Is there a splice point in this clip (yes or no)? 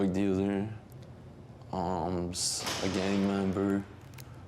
no